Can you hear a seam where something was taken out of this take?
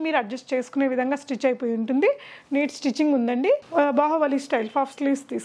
yes; 1 cut; at 3.7 s

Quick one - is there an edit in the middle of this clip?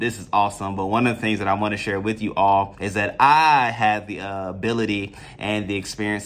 no; 0 cuts

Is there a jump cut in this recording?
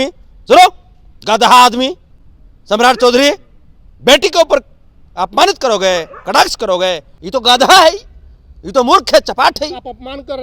yes; 1 cut; at 7.1 s

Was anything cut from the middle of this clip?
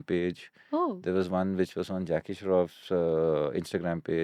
no; 0 cuts

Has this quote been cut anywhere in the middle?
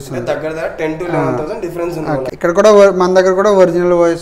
no; 0 cuts

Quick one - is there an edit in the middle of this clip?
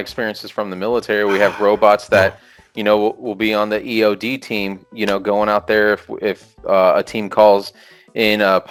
no; 0 cuts

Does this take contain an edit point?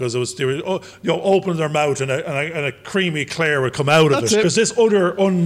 yes; 1 cut; at 4.4 s

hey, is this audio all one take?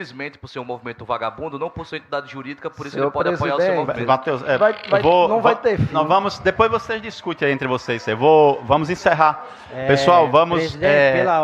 yes; 0 cuts

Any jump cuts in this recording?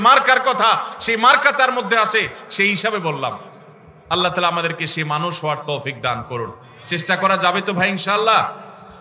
no; 0 cuts

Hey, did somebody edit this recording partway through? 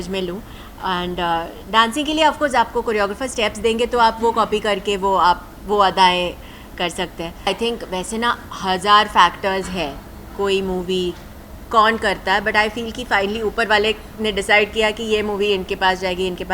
yes; 1 cut; at 7.5 s

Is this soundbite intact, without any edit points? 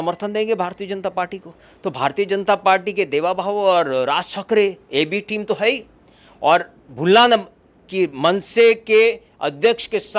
yes; 0 cuts

